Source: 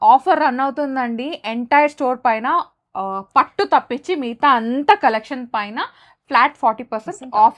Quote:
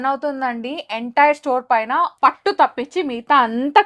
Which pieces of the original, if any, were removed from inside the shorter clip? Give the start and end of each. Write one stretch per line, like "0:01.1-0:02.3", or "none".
0:02.7-0:03.3